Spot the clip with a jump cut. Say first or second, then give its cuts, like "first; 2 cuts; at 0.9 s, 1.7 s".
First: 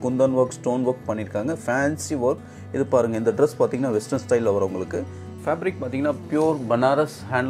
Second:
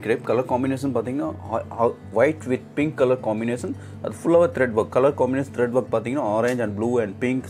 first; 1 cut; at 5.3 s